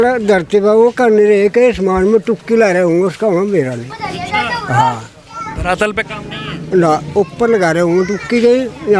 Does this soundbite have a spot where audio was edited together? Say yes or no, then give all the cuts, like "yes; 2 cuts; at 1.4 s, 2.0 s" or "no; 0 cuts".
no; 0 cuts